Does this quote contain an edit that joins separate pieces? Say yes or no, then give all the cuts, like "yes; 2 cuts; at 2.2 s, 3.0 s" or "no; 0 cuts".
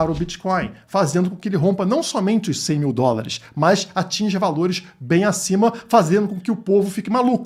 no; 0 cuts